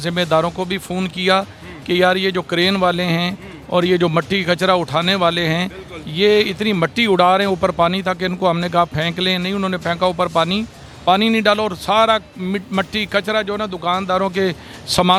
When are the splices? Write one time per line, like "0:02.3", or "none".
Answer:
none